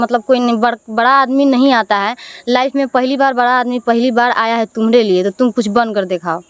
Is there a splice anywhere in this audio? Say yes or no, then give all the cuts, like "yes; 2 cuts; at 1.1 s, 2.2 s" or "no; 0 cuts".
no; 0 cuts